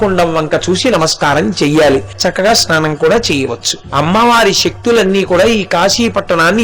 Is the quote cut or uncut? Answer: cut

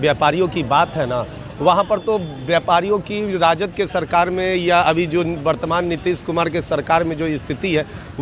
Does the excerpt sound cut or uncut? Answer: uncut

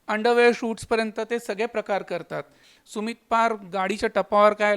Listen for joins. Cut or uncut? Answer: cut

